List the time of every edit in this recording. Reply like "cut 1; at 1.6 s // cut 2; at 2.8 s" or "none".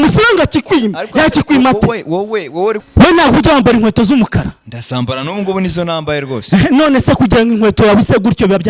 cut 1; at 2.8 s